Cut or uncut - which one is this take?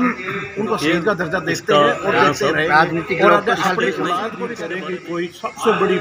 cut